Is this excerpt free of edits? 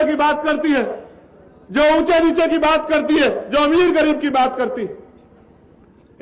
yes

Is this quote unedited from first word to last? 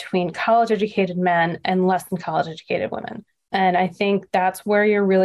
yes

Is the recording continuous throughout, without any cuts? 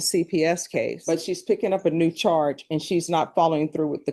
yes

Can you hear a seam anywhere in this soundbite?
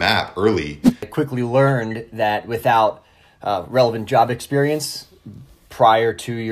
yes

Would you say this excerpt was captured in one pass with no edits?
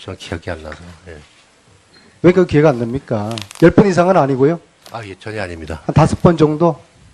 no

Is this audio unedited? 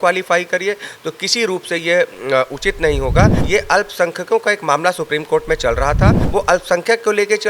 no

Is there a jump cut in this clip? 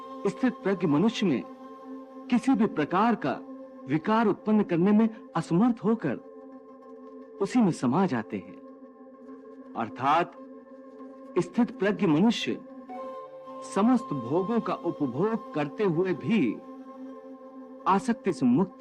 no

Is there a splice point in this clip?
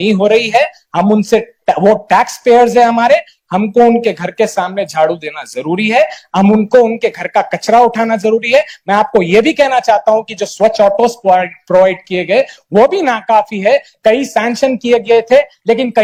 no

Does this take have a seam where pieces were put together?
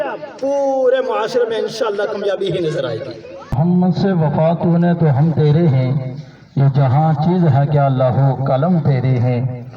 yes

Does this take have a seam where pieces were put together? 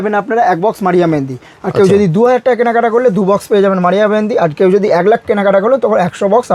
no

